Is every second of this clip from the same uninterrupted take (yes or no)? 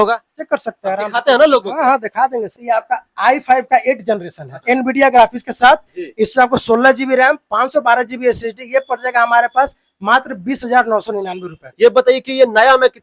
no